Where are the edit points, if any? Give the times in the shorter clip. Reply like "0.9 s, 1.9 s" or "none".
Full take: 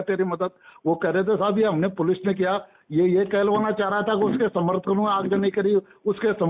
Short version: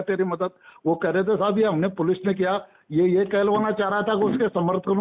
none